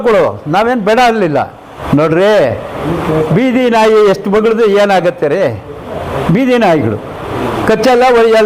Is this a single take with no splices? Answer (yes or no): no